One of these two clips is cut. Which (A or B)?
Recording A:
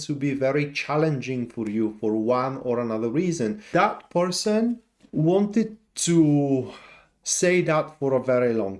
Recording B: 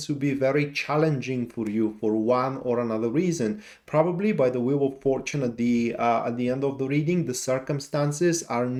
A